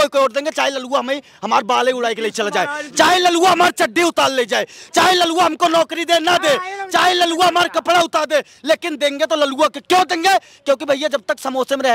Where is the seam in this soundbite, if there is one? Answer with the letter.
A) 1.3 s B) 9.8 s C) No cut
C